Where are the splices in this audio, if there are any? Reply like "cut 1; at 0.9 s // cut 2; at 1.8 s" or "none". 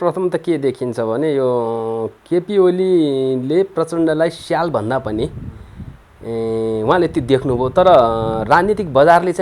none